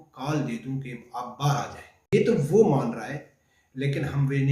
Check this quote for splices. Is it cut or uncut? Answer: cut